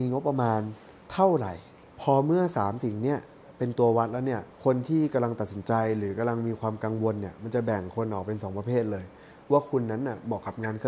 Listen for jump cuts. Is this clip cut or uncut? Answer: cut